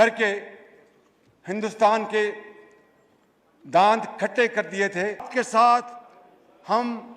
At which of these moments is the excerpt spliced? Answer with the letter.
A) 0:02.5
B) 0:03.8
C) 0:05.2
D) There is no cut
C